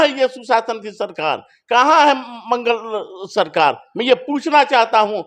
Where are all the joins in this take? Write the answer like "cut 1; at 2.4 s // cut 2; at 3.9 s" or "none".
none